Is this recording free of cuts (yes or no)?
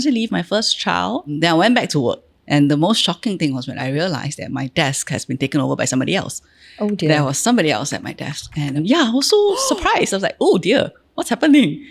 no